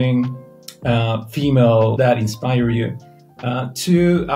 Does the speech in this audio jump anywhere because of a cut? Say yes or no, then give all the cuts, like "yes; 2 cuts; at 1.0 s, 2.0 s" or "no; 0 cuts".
yes; 1 cut; at 2.0 s